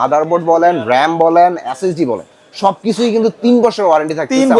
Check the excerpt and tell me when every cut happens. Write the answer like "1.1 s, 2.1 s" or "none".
none